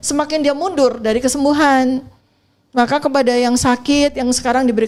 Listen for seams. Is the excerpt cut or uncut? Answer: uncut